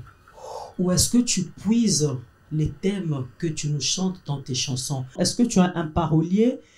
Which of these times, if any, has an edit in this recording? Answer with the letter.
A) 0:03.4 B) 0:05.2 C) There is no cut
B